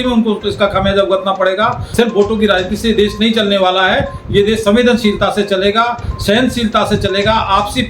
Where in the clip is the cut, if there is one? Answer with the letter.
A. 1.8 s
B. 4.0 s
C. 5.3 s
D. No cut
A